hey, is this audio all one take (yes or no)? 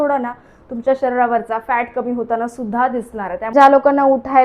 no